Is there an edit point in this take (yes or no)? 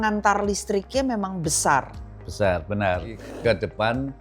yes